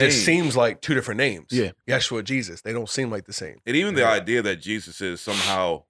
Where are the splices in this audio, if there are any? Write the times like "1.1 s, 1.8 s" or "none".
none